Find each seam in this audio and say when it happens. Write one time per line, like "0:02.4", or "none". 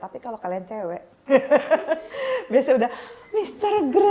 0:01.1